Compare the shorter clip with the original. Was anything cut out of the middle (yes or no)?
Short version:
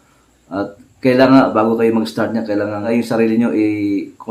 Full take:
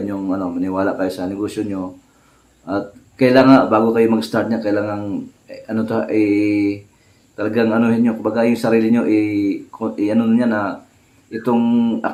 yes